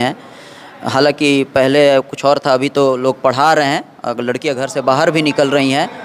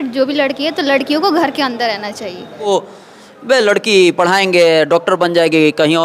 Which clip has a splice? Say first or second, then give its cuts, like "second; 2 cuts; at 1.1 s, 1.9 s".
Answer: second; 1 cut; at 2.7 s